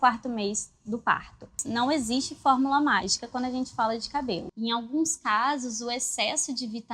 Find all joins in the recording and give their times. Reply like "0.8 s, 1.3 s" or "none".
1.6 s, 4.5 s